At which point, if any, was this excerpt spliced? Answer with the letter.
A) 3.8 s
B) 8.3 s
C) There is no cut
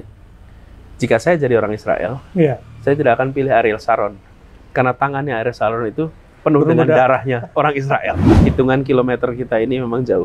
B